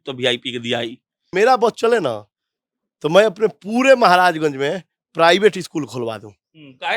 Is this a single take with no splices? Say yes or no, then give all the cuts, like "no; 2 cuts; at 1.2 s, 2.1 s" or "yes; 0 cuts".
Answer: no; 1 cut; at 1.2 s